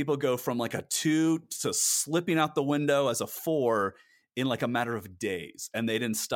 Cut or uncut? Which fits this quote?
uncut